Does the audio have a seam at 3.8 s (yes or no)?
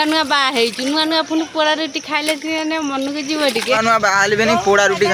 yes